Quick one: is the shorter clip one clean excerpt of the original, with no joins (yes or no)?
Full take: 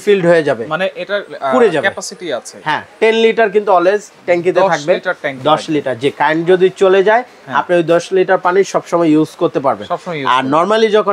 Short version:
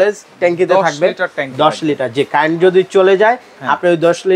yes